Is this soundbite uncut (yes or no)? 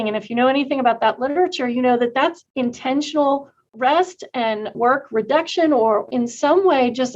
no